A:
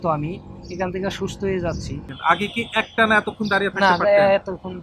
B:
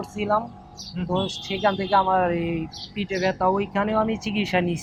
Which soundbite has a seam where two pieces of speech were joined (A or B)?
A